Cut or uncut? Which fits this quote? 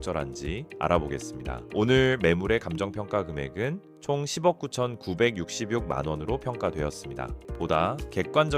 cut